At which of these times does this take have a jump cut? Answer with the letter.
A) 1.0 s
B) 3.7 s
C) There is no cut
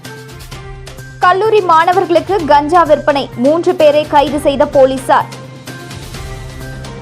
A